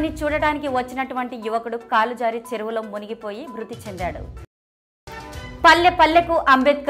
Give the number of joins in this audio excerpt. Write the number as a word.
one